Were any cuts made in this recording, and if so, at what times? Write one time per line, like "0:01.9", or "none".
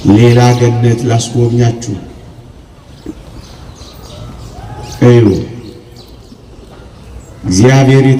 none

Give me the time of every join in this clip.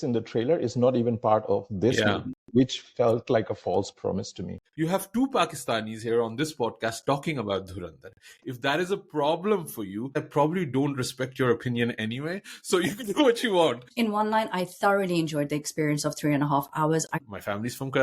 0:04.6
0:10.2
0:13.9
0:17.1

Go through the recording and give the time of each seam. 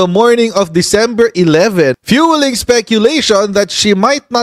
0:02.0

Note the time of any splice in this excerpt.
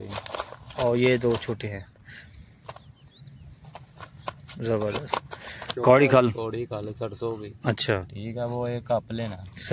0:05.7

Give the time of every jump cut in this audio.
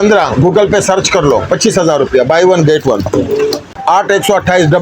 0:03.7

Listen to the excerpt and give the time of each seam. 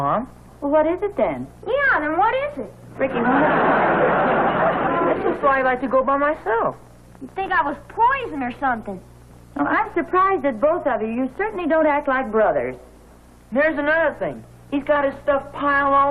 0:05.2

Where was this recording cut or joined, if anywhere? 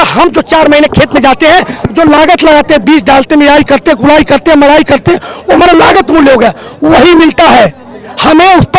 none

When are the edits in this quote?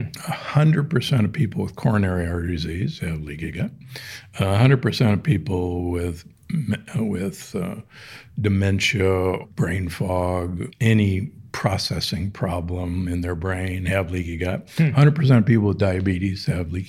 0:09.4
0:10.7

